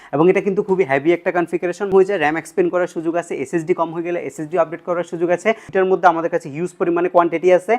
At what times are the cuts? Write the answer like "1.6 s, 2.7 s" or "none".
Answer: 1.9 s, 5.6 s